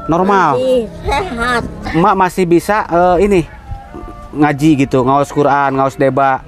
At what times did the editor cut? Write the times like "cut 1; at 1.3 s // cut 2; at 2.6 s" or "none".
cut 1; at 1.8 s